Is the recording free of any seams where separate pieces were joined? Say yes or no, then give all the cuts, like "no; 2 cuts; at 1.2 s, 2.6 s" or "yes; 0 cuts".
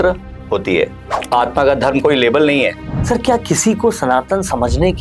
no; 1 cut; at 2.9 s